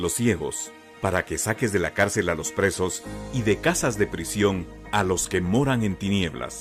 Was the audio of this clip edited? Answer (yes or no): no